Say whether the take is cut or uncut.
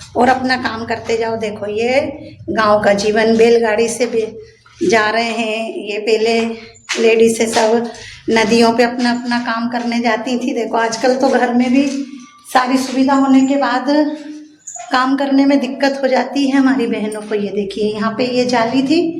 uncut